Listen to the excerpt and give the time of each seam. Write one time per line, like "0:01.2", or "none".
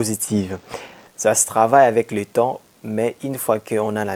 none

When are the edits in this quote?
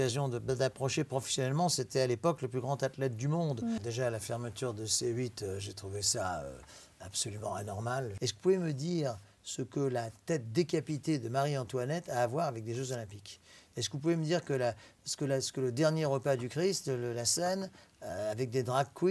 0:03.8
0:08.1

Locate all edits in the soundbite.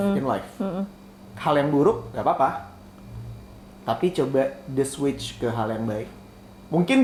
none

